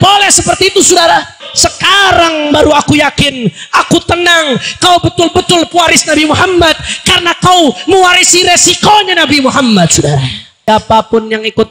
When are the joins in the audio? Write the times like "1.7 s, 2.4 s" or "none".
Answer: 1.5 s, 10.7 s

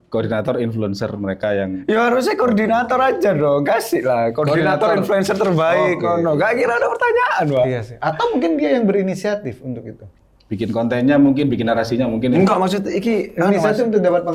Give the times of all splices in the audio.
none

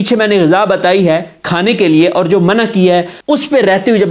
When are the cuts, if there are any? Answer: 3.1 s

